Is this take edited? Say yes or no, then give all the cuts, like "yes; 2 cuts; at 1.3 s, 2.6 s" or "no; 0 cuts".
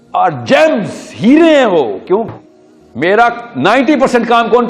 yes; 1 cut; at 2.3 s